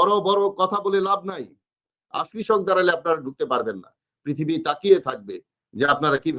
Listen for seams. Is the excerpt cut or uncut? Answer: cut